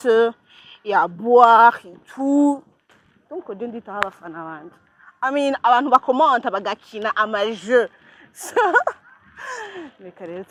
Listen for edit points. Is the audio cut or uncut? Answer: uncut